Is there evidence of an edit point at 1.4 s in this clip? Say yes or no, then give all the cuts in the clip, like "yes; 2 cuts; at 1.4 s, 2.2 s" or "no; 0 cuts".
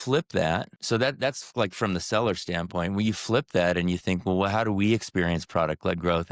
no; 0 cuts